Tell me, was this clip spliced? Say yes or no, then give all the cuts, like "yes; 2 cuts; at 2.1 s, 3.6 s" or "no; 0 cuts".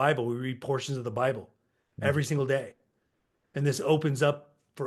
no; 0 cuts